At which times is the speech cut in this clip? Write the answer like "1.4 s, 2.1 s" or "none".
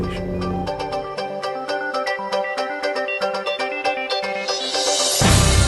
none